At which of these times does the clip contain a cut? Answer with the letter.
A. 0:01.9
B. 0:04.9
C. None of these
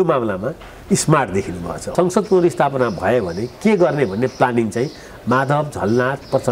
A